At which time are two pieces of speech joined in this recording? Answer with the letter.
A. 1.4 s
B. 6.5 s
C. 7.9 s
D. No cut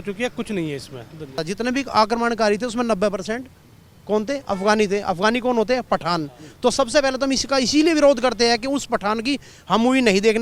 A